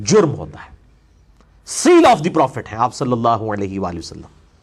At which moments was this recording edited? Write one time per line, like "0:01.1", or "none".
0:01.7